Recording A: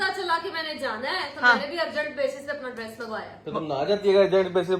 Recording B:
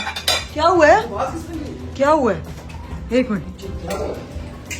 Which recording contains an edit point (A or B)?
B